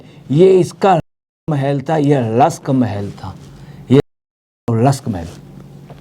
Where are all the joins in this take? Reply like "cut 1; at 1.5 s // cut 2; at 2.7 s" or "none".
none